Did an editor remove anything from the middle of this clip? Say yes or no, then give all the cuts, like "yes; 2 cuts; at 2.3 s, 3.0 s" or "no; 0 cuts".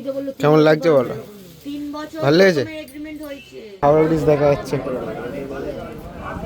yes; 1 cut; at 3.8 s